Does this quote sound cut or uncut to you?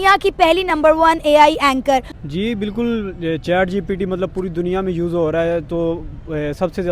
uncut